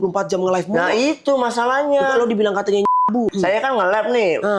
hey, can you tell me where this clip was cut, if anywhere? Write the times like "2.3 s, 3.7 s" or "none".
3.3 s